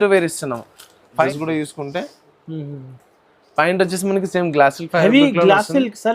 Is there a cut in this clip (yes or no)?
yes